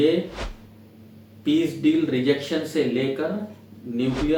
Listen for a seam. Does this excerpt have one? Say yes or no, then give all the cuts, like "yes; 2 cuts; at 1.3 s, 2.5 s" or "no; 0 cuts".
no; 0 cuts